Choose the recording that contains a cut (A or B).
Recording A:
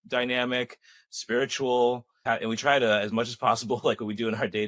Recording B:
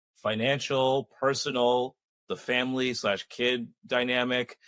A